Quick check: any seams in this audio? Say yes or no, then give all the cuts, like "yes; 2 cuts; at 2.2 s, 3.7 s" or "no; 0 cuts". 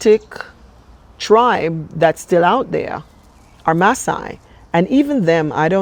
no; 0 cuts